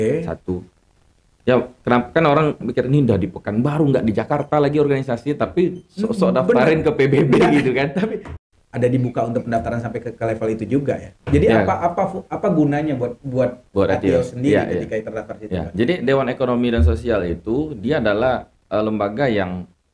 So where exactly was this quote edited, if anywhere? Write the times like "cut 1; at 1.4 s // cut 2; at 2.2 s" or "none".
cut 1; at 8.3 s